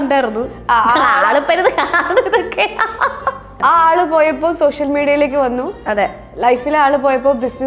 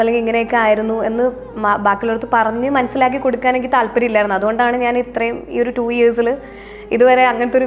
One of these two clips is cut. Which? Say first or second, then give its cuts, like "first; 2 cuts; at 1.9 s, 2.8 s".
first; 1 cut; at 3.5 s